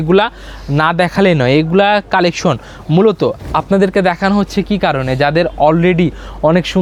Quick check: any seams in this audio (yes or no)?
no